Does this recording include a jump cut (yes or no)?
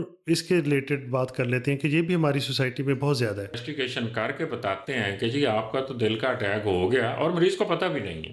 yes